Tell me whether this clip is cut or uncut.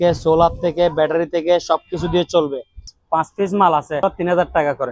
cut